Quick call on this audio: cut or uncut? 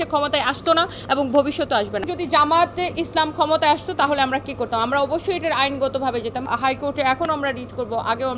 cut